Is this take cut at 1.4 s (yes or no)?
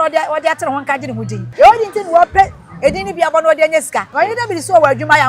yes